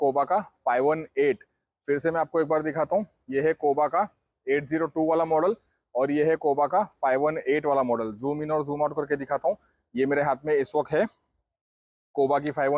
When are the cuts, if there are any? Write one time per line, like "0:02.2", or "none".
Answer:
none